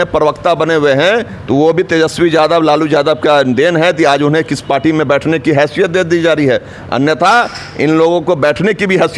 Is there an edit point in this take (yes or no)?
no